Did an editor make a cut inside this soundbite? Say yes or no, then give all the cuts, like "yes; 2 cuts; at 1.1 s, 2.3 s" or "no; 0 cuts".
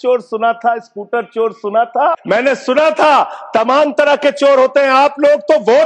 yes; 1 cut; at 2.2 s